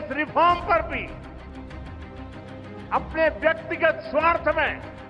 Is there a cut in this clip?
yes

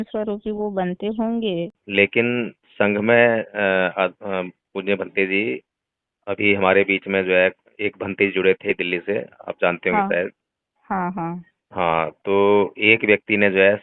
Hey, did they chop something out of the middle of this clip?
yes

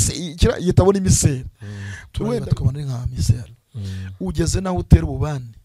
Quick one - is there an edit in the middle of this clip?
yes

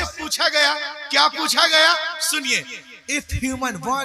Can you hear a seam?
no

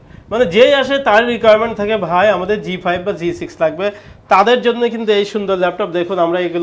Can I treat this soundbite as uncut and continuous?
yes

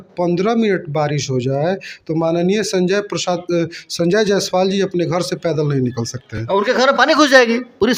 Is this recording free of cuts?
yes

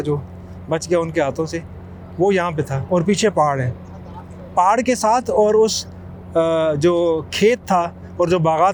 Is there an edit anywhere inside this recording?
no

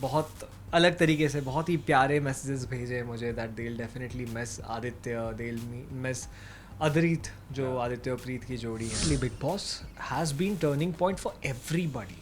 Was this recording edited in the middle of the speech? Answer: yes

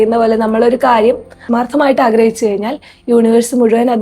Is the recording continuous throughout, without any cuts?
no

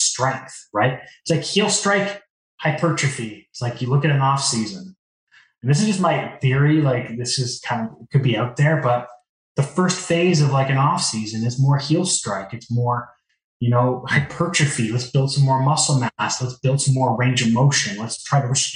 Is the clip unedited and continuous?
yes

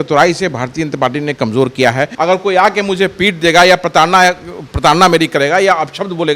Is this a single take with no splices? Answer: no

